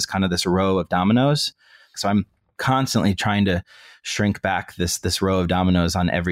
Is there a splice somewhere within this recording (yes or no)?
yes